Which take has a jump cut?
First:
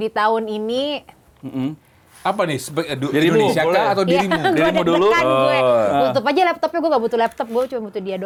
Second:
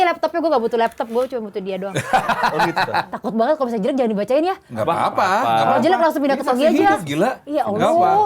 second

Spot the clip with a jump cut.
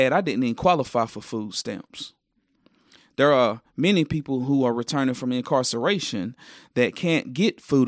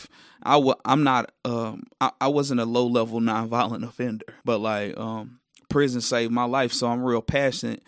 second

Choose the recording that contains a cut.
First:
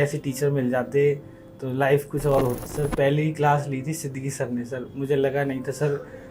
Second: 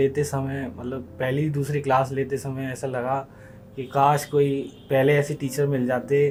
first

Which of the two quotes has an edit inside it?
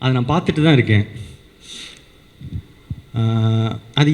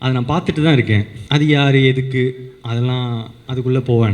second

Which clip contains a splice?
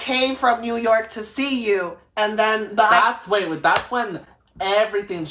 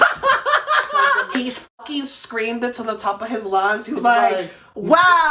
second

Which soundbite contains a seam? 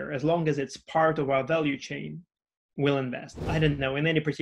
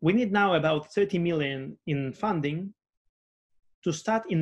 first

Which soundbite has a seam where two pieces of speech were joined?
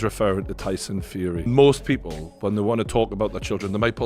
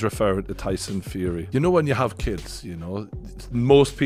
first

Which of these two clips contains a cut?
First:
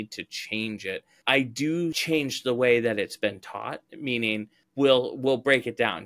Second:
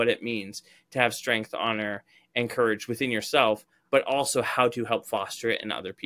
first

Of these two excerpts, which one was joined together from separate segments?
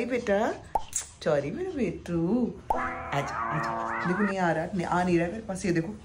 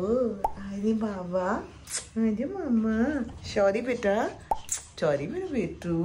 first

